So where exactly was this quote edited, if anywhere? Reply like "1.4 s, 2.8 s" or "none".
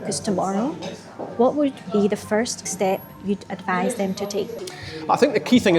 2.6 s, 4.6 s